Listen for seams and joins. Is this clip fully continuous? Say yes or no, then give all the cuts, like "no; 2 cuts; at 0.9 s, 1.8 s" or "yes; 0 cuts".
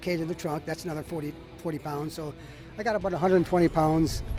yes; 0 cuts